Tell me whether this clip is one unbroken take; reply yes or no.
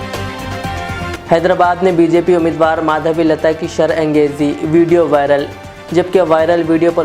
no